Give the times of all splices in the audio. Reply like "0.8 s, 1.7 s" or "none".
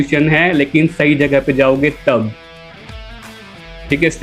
none

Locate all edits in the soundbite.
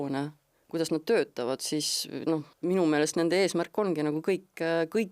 2.5 s

